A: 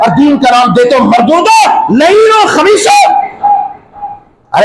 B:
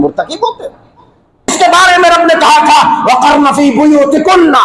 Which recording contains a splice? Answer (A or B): B